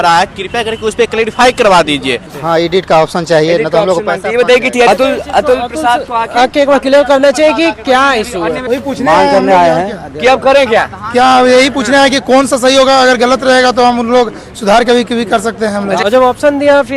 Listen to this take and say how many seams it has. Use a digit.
4